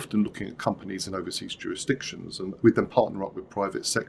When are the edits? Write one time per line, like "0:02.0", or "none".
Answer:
0:02.4